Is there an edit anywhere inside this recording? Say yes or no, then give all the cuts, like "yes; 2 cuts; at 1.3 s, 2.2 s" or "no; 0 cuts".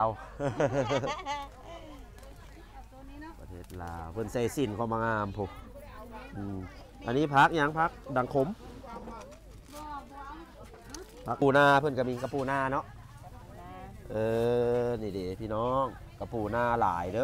yes; 1 cut; at 11.4 s